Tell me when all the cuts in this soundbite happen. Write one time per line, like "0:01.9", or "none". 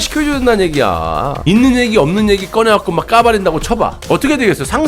0:01.4
0:04.0